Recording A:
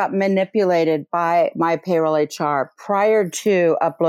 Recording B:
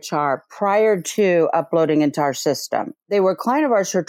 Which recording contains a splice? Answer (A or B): B